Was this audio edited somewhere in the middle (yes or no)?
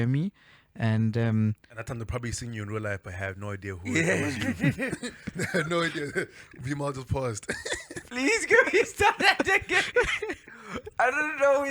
yes